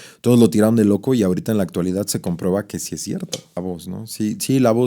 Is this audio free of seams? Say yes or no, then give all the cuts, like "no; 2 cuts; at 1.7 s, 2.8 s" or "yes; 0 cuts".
no; 1 cut; at 3.6 s